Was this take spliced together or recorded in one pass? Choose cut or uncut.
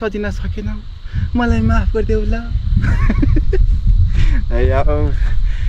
uncut